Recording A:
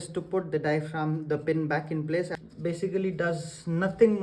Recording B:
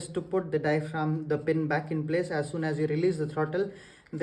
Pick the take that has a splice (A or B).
A